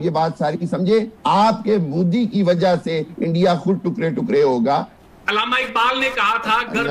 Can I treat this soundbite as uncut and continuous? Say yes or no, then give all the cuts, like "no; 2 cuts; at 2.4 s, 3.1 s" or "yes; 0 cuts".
no; 2 cuts; at 1.1 s, 4.9 s